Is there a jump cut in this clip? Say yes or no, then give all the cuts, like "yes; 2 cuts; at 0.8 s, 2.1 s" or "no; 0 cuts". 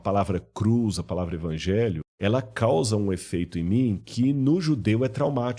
yes; 1 cut; at 2.1 s